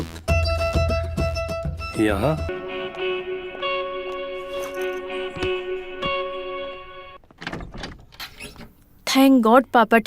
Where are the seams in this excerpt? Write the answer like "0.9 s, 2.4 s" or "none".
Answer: 2.5 s

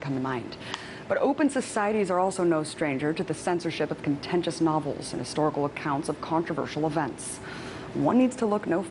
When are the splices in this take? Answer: 2.9 s

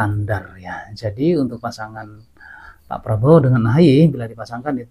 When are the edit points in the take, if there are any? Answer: none

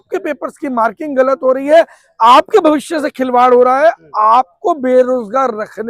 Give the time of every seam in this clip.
none

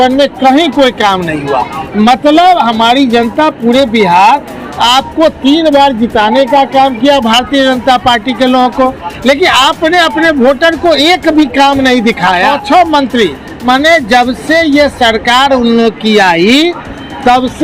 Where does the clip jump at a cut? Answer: 12.4 s

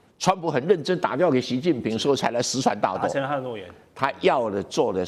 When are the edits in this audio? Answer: none

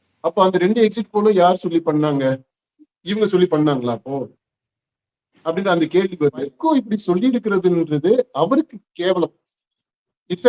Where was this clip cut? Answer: 6.6 s

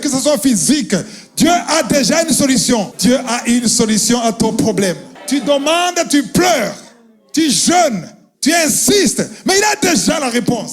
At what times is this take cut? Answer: 2.9 s, 5.1 s

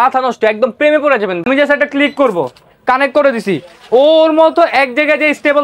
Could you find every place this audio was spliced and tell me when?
1.4 s

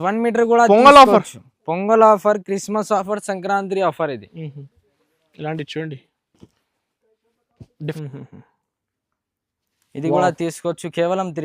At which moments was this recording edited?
7.9 s

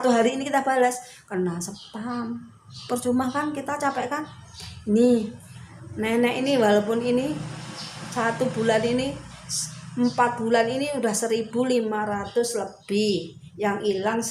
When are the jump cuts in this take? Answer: none

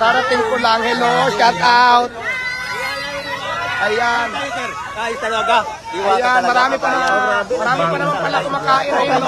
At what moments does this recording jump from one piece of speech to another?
none

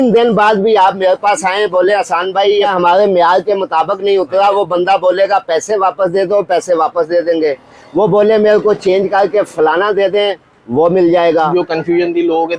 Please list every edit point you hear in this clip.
2.7 s, 11.5 s

